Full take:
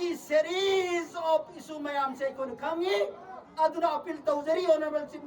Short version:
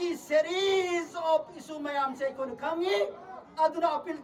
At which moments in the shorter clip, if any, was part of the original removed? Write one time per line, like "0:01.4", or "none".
none